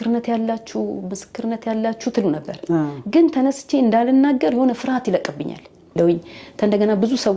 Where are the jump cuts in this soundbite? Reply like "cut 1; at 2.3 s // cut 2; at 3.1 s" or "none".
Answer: cut 1; at 6.0 s